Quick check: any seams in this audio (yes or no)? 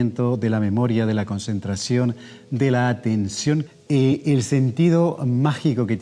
yes